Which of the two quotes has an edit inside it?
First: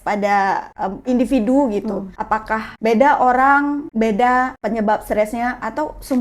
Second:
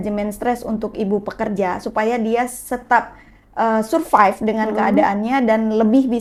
first; 4 cuts; at 1.0 s, 2.4 s, 3.8 s, 4.6 s

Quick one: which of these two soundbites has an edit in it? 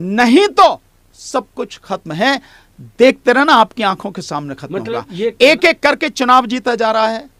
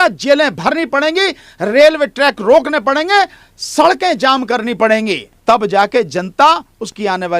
second; 1 cut; at 5.3 s

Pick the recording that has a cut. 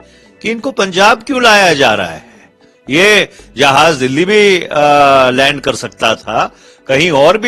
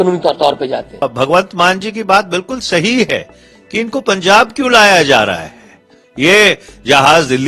second; 1 cut; at 1.0 s

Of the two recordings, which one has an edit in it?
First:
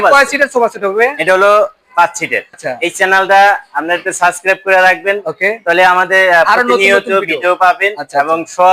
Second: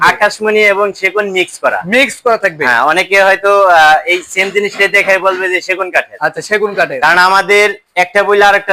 first; 1 cut; at 2.6 s

